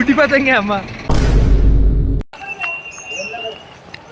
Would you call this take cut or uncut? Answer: uncut